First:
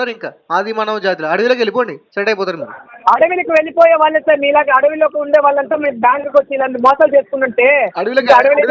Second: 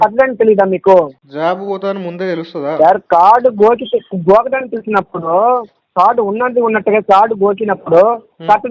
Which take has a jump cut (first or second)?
second